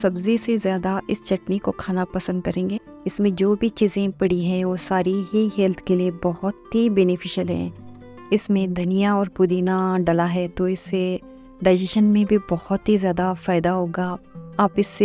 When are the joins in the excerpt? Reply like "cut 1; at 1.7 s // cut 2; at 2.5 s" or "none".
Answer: cut 1; at 2.7 s